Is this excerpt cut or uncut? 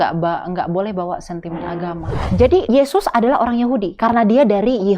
cut